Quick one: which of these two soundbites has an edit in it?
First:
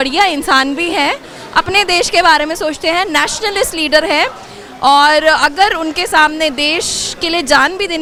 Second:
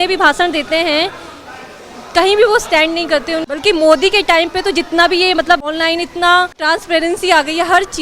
second; 3 cuts; at 3.5 s, 5.7 s, 6.6 s

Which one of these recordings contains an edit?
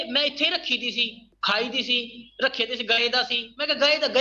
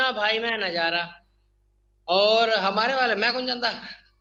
first; 1 cut; at 1.2 s

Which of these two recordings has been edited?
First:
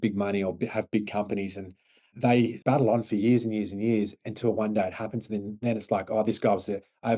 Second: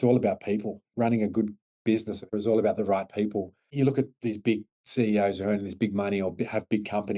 second; 4 cuts; at 0.9 s, 2.3 s, 3.6 s, 4.8 s

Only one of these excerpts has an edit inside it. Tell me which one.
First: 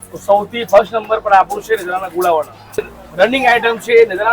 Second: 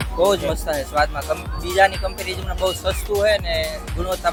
first; 1 cut; at 2.8 s

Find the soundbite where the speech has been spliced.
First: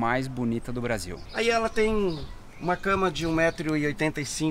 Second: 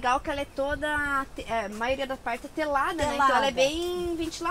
first; 1 cut; at 1.2 s

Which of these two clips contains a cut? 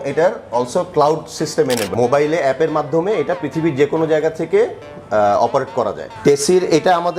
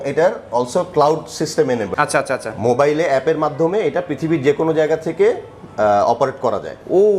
first; 2 cuts; at 1.9 s, 6.1 s

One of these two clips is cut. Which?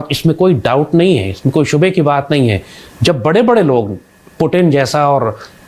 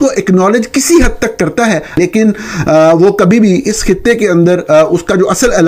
second; 1 cut; at 2.0 s

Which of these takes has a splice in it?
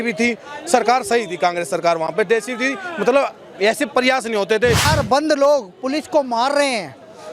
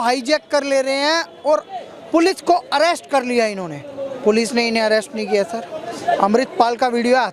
first; 1 cut; at 4.9 s

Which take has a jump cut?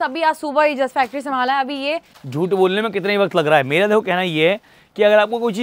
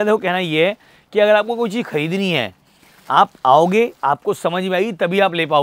first; 1 cut; at 2.2 s

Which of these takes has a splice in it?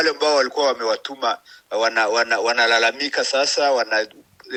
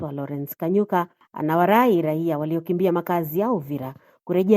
second; 1 cut; at 1.2 s

